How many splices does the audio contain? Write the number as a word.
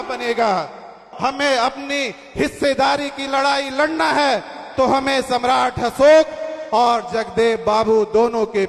one